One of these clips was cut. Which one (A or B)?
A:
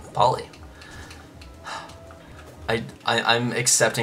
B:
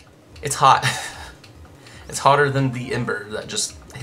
A